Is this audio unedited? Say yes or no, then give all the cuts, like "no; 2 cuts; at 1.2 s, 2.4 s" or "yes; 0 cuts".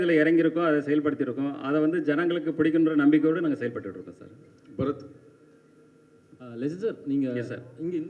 yes; 0 cuts